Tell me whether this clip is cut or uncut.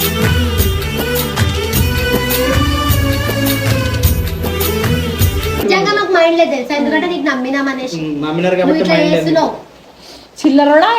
uncut